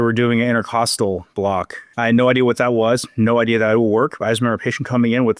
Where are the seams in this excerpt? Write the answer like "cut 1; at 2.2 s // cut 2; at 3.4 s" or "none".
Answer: cut 1; at 2.0 s